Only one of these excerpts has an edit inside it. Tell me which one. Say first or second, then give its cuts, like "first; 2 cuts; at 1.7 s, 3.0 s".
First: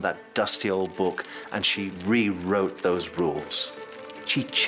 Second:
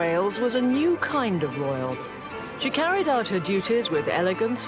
first; 1 cut; at 1.9 s